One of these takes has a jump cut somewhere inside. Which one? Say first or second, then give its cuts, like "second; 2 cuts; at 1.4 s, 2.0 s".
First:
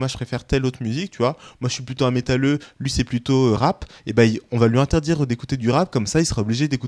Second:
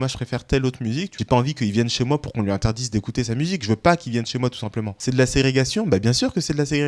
second; 2 cuts; at 1.1 s, 5.0 s